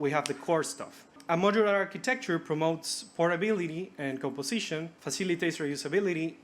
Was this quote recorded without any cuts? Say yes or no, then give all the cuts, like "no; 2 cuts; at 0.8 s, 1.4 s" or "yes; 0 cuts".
no; 2 cuts; at 1.2 s, 5.0 s